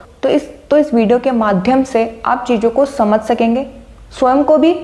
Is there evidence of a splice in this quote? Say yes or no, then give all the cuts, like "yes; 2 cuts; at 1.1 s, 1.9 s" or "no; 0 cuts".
no; 0 cuts